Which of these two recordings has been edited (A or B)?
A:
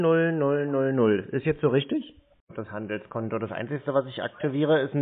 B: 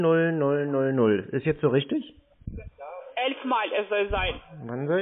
A